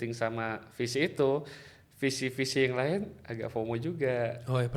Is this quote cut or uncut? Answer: uncut